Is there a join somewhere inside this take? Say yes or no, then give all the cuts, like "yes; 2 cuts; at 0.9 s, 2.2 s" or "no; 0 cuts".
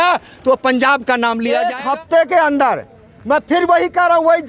yes; 1 cut; at 1.7 s